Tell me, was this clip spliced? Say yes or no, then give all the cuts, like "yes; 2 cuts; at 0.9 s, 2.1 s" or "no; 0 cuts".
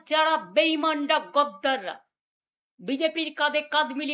no; 0 cuts